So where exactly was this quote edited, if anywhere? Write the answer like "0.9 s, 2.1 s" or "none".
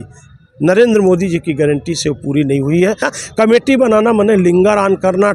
3.1 s